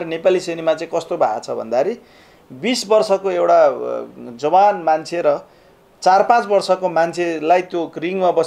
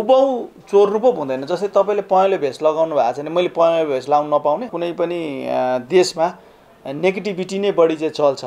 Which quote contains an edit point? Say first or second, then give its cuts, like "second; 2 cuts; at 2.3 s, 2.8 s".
second; 1 cut; at 4.7 s